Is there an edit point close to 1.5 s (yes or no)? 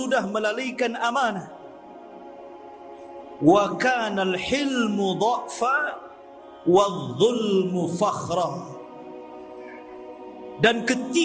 yes